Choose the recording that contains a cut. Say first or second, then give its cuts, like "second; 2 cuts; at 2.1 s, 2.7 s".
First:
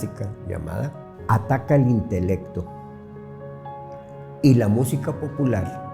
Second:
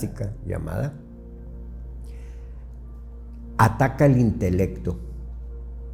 first; 1 cut; at 1.1 s